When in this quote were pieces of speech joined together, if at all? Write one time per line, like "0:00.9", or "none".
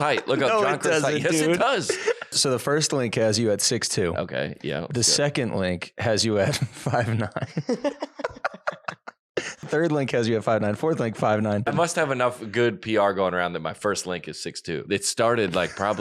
0:02.3
0:09.6
0:11.7
0:14.8